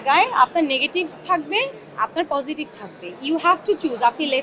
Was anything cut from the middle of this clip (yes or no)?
no